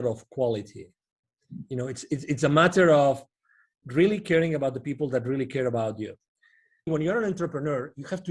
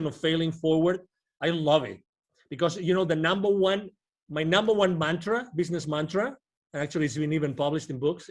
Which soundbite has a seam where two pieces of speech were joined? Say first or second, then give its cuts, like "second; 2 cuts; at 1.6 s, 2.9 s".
first; 1 cut; at 6.9 s